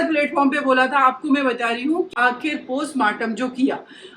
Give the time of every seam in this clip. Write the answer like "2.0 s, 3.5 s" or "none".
2.1 s